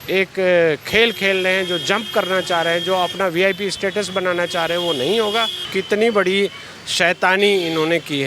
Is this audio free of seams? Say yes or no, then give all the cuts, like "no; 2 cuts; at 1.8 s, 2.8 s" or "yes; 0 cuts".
no; 1 cut; at 5.6 s